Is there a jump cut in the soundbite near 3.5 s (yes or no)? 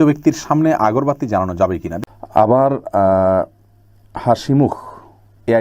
no